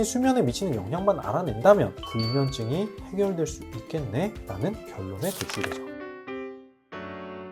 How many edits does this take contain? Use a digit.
1